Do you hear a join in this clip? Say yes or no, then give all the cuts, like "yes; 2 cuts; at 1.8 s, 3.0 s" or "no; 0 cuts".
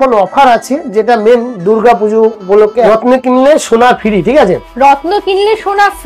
yes; 1 cut; at 2.8 s